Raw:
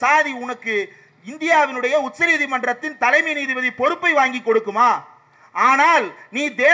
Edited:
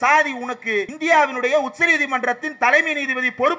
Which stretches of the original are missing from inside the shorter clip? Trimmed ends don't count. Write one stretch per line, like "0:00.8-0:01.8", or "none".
0:00.9-0:01.3

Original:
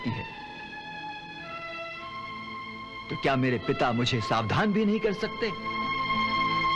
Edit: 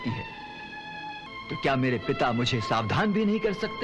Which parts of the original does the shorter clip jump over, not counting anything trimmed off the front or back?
0:01.3-0:02.9

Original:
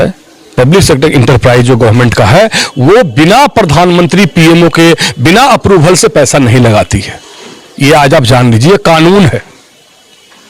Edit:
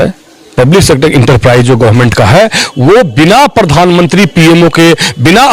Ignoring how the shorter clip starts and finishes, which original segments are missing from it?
none

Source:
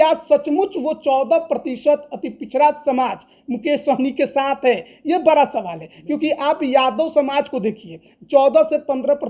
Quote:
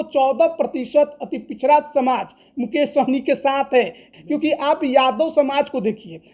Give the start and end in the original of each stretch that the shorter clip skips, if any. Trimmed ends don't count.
0:04.9-0:05.8

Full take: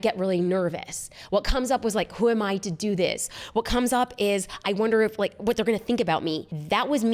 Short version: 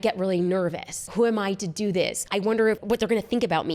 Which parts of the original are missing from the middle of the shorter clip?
0:01.1-0:02.1
0:03.7-0:05.2

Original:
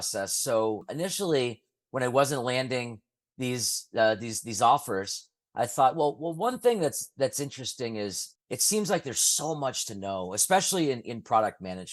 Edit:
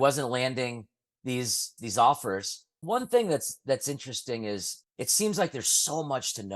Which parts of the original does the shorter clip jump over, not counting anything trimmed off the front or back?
0:03.8-0:04.3
0:05.4-0:06.3

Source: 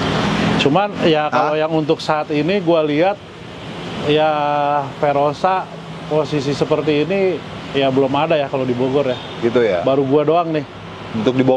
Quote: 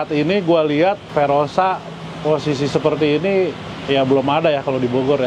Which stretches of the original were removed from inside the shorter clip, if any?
0:03.2-0:04.9

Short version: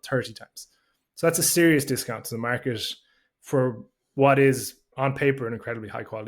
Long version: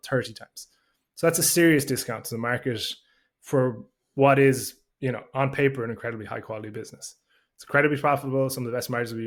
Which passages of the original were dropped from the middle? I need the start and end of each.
0:04.9-0:05.2

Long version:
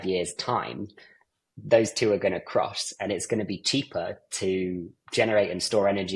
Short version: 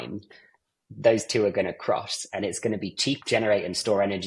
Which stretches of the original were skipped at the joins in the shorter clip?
0:03.9-0:05.1

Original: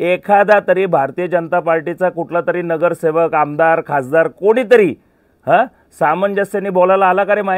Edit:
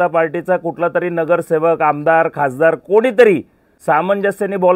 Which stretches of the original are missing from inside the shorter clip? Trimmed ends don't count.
0:05.2-0:05.8

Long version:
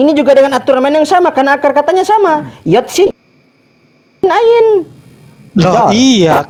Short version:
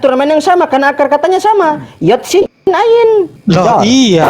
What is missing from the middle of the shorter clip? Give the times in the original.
0:03.2-0:04.1
0:04.9-0:05.4

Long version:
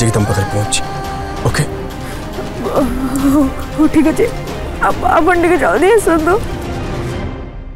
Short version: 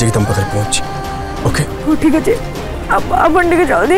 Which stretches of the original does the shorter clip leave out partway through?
0:01.7-0:03.7

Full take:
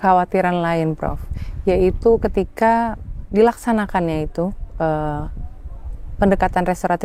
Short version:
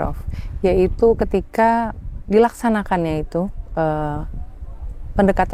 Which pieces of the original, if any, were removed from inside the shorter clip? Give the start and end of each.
none

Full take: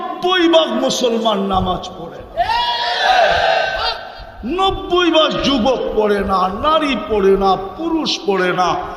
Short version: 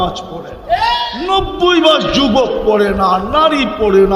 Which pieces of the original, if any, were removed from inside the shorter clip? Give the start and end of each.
0:02.8-0:04.4

